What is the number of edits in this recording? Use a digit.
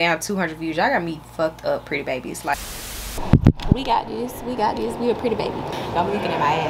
2